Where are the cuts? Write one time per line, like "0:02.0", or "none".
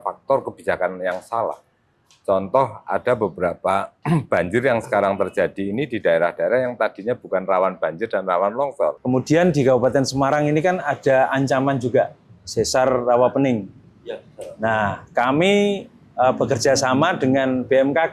0:09.0